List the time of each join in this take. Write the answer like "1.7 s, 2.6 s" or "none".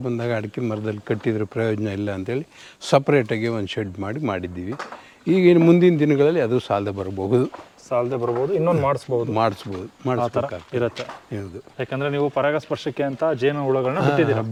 none

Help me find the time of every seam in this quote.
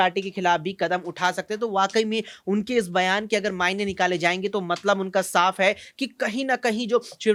none

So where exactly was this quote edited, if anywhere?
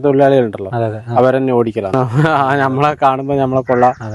2.0 s

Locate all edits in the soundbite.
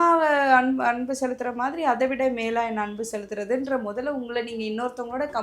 none

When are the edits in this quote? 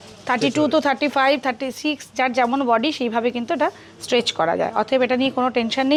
none

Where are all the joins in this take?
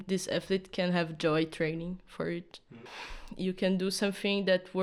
2.7 s

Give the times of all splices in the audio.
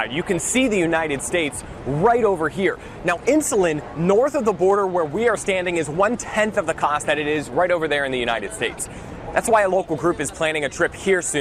none

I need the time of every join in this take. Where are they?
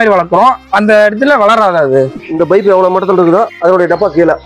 2.2 s

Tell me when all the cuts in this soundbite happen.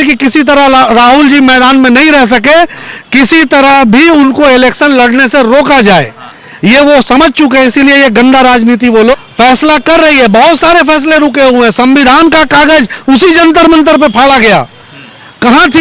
9.1 s

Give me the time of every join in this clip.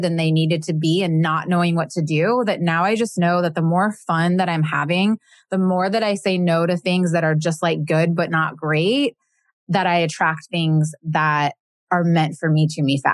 11.7 s

